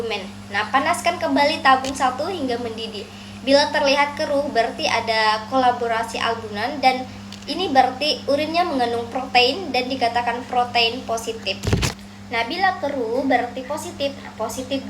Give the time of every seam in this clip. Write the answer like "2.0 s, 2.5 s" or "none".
12.0 s